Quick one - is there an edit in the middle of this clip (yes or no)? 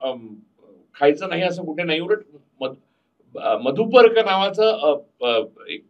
no